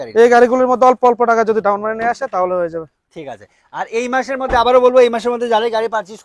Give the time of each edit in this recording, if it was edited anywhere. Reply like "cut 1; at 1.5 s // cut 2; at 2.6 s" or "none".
none